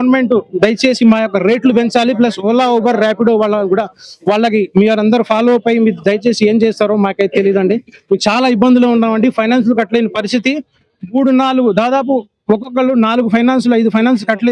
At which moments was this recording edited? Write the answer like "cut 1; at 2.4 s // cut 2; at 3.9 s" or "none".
none